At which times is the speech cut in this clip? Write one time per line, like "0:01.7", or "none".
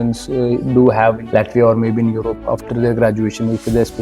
0:01.2